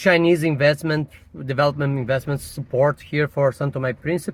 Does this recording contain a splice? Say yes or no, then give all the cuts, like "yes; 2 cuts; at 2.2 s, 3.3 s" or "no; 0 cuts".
no; 0 cuts